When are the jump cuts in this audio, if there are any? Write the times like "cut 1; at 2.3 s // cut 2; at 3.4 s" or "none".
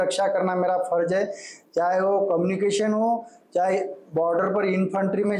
none